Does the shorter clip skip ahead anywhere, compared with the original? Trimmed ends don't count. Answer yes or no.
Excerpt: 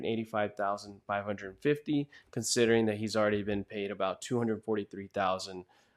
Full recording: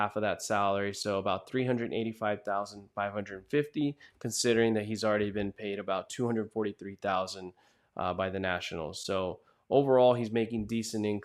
no